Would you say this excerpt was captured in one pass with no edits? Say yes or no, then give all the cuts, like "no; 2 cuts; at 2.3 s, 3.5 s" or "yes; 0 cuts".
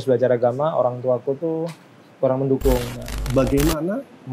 no; 1 cut; at 3.2 s